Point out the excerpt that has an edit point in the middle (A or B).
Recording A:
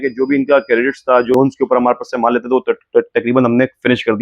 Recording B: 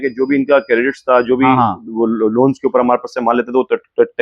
A